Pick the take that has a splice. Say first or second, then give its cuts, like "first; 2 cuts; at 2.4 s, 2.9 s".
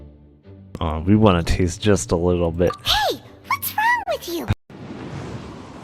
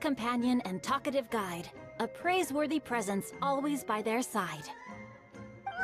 first; 1 cut; at 4.7 s